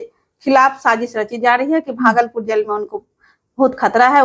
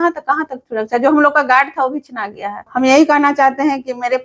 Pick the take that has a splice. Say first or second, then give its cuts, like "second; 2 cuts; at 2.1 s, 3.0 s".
second; 1 cut; at 2.5 s